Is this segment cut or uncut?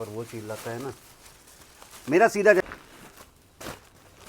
cut